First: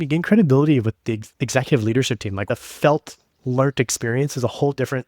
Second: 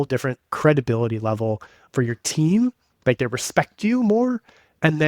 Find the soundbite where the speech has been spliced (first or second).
first